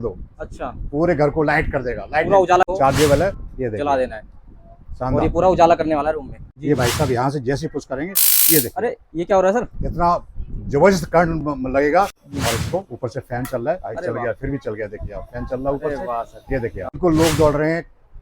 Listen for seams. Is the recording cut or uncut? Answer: cut